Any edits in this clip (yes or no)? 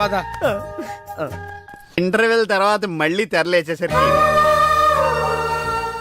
yes